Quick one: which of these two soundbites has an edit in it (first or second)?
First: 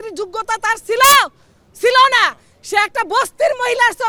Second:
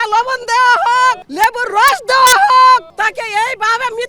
second